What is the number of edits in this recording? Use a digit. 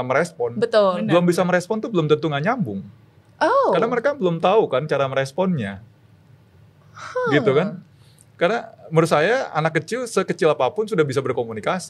0